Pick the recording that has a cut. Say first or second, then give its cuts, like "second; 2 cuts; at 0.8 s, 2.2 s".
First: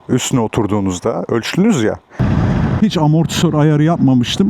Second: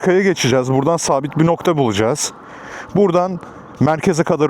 first; 1 cut; at 2.2 s